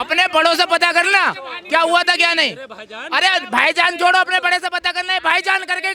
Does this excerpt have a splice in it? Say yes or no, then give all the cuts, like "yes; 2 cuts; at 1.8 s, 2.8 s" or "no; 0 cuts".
no; 0 cuts